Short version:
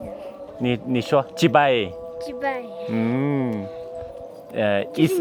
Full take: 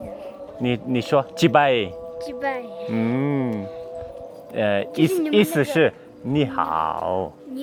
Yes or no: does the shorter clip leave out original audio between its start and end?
no